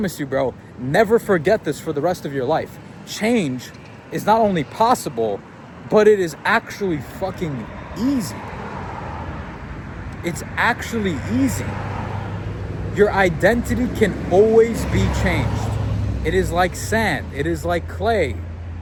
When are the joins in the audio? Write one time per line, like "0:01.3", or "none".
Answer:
none